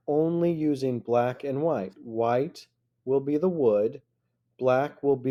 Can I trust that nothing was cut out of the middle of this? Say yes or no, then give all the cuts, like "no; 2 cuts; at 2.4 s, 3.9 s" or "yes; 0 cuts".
yes; 0 cuts